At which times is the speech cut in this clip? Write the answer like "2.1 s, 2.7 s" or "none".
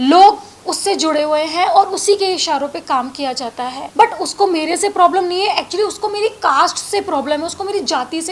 3.8 s